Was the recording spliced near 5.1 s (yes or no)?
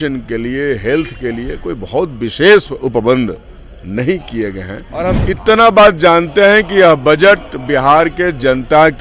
yes